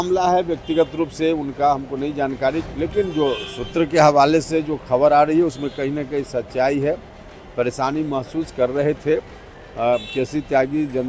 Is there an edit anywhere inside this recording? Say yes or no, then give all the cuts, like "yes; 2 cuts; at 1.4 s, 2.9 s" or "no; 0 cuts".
yes; 1 cut; at 2.7 s